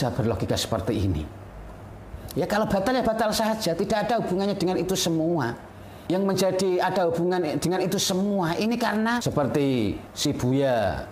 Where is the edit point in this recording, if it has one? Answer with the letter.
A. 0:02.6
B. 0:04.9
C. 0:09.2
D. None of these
C